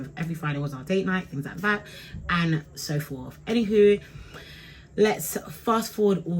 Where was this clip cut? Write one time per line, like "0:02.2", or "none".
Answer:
none